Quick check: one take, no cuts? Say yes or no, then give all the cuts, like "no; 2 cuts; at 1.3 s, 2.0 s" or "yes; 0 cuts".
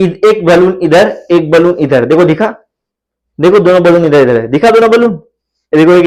yes; 0 cuts